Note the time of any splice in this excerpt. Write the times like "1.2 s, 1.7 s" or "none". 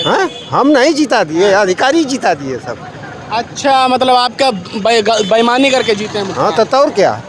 none